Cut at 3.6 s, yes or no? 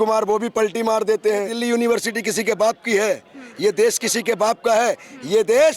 no